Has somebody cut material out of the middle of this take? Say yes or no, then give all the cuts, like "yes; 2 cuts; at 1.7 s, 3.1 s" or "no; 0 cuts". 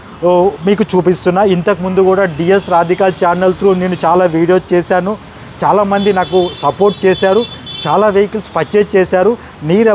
no; 0 cuts